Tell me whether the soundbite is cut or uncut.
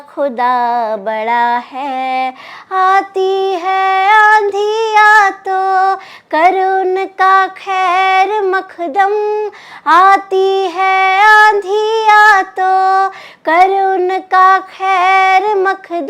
uncut